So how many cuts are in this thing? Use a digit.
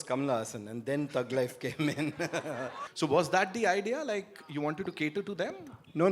1